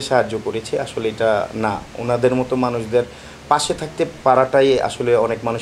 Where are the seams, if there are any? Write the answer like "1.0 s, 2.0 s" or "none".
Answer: none